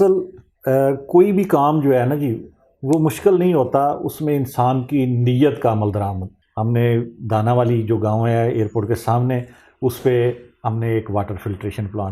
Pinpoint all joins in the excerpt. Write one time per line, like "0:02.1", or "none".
0:06.3

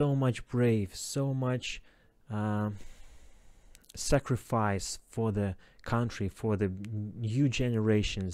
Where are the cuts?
none

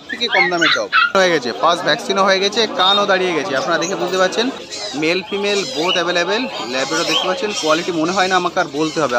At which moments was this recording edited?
0:01.1
0:04.7

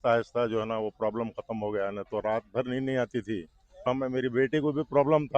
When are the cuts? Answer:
0:03.9

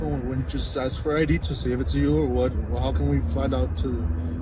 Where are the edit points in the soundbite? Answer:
none

